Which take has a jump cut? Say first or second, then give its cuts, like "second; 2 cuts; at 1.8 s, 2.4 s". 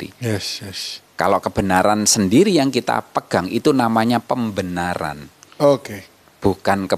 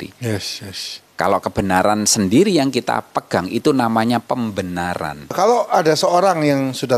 second; 1 cut; at 5.3 s